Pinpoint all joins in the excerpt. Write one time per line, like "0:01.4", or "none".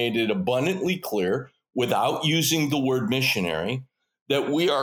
none